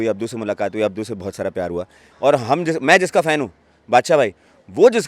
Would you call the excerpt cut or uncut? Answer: cut